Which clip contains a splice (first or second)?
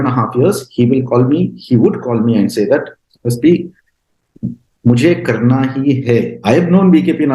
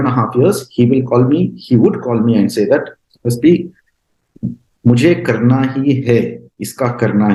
first